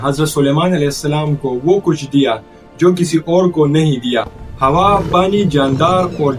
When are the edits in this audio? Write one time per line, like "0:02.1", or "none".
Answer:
0:04.4